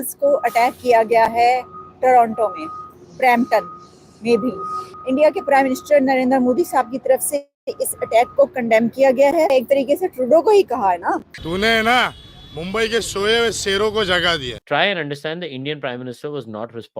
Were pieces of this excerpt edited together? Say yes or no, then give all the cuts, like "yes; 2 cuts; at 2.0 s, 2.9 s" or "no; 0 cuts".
no; 0 cuts